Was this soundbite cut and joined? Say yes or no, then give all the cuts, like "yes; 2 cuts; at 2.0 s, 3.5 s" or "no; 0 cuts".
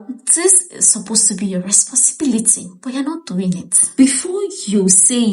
yes; 1 cut; at 4.0 s